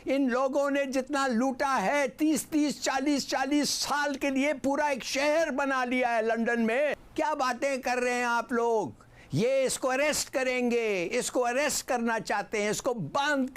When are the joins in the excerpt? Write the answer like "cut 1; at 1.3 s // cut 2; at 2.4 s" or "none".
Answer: cut 1; at 7.0 s